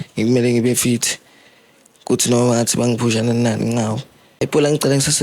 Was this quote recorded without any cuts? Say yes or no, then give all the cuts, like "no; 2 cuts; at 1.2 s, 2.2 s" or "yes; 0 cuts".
no; 1 cut; at 4.2 s